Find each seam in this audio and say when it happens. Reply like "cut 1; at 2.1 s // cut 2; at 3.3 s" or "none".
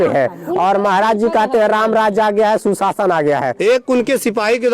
cut 1; at 3.5 s